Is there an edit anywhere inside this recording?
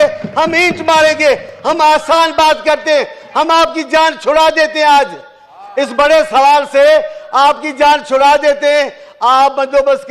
no; 0 cuts

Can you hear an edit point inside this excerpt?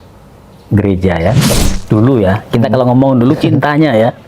yes; 1 cut; at 1.5 s

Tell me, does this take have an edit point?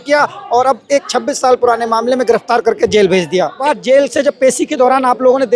yes; 1 cut; at 3.6 s

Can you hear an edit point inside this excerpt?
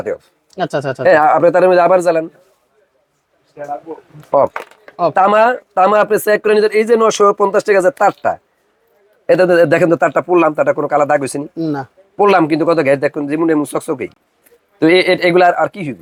no; 0 cuts

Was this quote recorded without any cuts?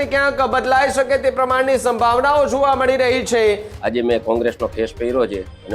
no; 1 cut; at 3.7 s

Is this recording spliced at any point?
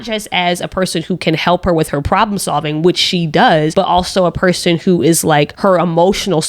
yes; 2 cuts; at 3.7 s, 5.5 s

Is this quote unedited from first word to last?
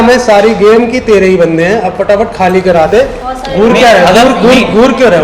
no; 1 cut; at 3.2 s

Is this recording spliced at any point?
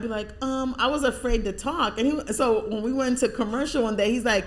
no; 0 cuts

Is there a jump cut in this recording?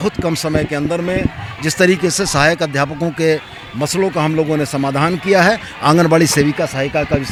no; 0 cuts

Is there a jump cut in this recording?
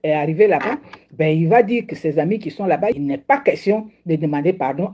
yes; 1 cut; at 3.0 s

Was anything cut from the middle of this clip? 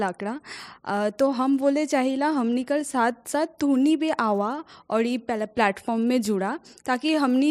no; 0 cuts

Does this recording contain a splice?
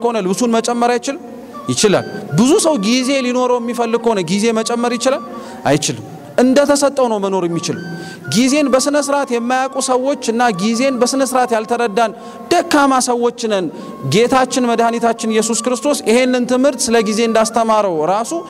no; 0 cuts

